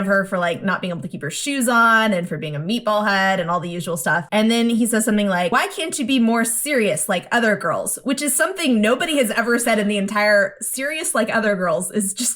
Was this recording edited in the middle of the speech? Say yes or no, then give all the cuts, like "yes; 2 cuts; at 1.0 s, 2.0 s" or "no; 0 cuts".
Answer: yes; 2 cuts; at 4.2 s, 5.5 s